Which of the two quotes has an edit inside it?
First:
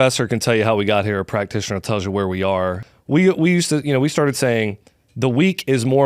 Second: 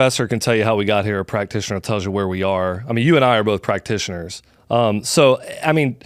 first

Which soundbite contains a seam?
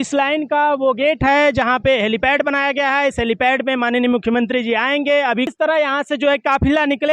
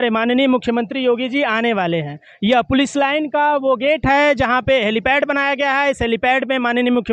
first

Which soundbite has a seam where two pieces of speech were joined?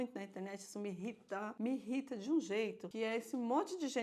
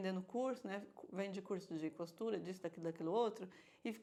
first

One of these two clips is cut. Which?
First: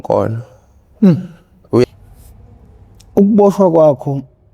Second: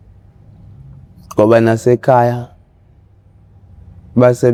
first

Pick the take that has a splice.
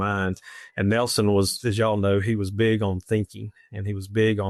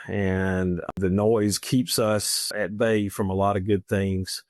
second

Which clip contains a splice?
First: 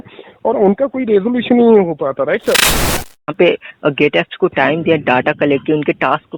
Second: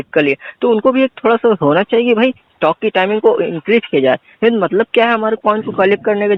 first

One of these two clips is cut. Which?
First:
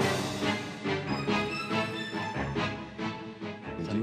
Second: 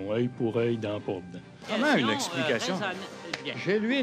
second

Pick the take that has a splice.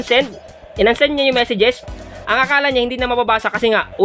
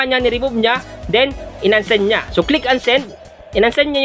first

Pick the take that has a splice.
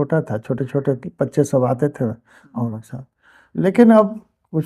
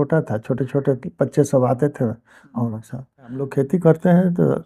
second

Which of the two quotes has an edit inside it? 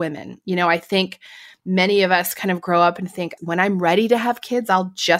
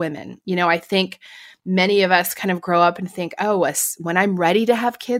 first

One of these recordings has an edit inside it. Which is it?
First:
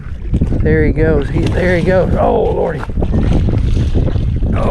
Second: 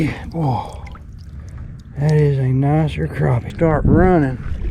second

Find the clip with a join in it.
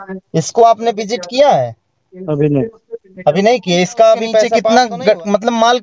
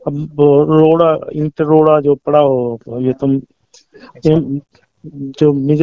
first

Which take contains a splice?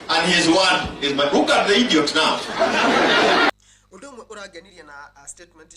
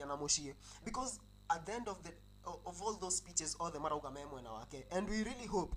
first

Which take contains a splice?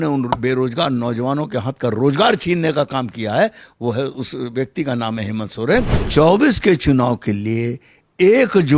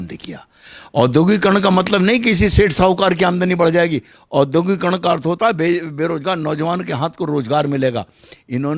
first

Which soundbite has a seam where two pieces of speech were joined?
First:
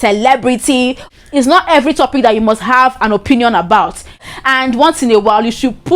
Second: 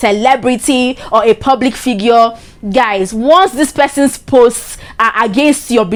first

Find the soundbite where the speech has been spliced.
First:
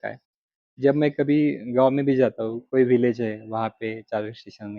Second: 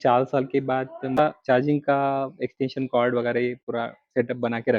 second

